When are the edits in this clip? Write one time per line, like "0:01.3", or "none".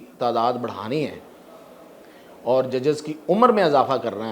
none